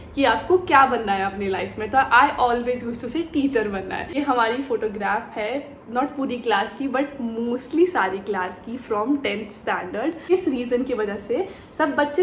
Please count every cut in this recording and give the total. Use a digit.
2